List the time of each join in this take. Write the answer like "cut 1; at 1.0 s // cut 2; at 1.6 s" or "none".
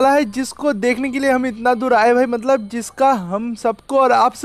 none